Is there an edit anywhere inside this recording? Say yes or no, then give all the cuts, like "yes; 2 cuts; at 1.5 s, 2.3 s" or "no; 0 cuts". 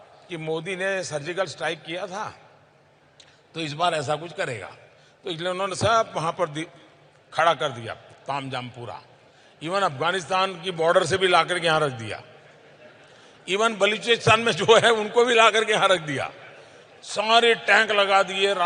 no; 0 cuts